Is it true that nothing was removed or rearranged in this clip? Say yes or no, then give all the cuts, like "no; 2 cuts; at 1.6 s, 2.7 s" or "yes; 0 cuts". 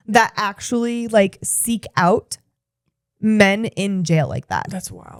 yes; 0 cuts